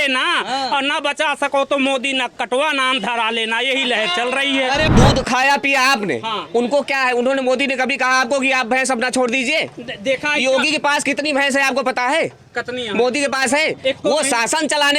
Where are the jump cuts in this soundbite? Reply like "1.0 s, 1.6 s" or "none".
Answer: 4.9 s